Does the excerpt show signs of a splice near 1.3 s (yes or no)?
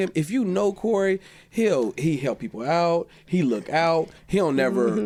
no